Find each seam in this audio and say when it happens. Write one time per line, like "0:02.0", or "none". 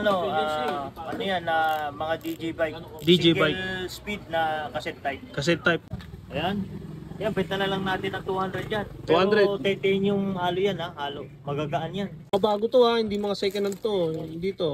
0:05.8
0:12.3